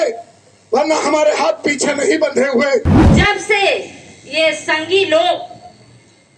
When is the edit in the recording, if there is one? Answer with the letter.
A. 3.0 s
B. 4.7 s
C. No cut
A